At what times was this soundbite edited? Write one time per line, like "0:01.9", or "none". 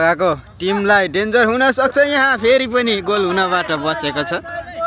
none

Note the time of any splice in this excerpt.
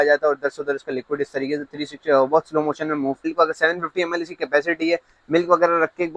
0:03.2

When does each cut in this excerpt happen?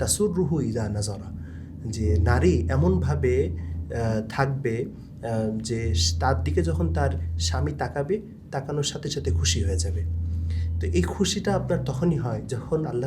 none

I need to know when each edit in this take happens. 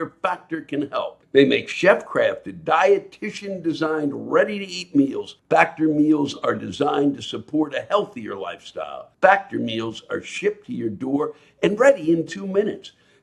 0:01.2
0:05.3
0:09.0

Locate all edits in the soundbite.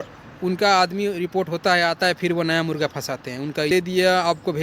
0:03.7

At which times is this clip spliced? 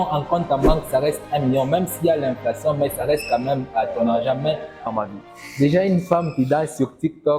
0:04.7

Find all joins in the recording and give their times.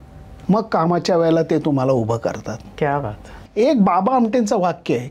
0:03.3

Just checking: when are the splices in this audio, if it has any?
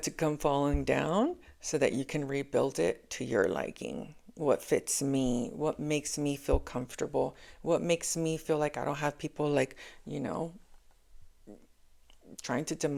none

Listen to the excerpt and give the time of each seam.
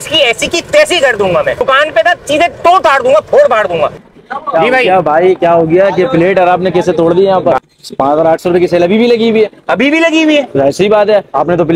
0:01.6
0:04.0
0:07.6

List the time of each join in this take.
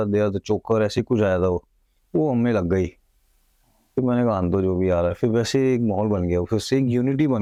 none

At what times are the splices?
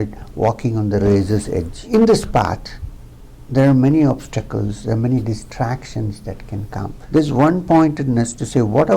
0:01.8
0:06.9

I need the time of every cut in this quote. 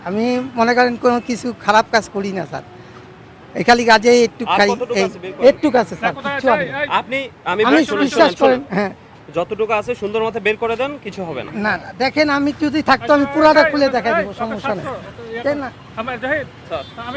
none

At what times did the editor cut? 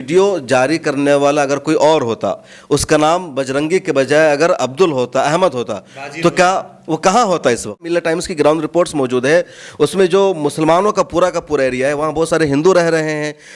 0:07.9

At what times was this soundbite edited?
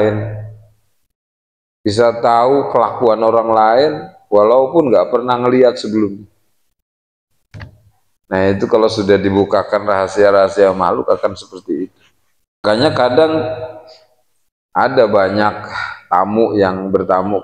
0:12.6

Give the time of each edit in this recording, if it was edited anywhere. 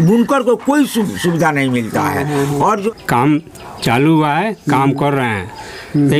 0:02.9

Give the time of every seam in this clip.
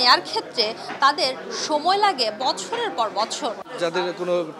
0:03.6

